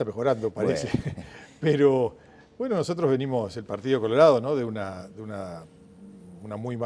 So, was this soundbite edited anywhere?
no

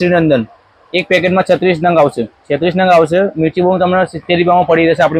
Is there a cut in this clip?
no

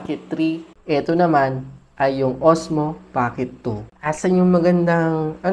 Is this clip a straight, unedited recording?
no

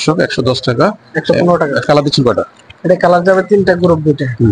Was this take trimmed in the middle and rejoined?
yes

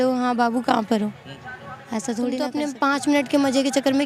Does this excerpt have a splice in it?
yes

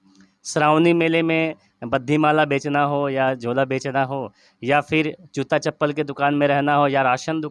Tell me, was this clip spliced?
no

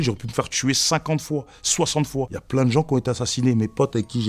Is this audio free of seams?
no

